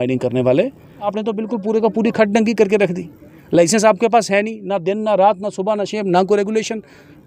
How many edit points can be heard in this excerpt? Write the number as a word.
one